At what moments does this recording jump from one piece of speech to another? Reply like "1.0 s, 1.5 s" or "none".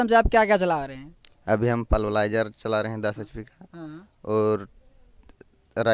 none